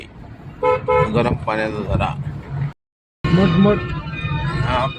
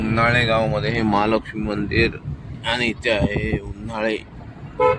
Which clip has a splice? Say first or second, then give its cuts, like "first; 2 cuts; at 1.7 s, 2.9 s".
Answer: first; 1 cut; at 2.7 s